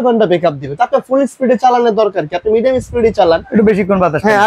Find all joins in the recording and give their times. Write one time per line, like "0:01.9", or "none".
none